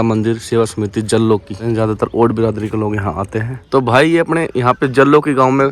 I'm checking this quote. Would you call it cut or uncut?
cut